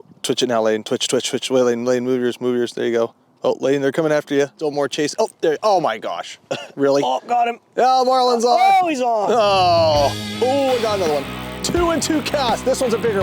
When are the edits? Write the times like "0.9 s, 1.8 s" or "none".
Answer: 4.6 s, 10.2 s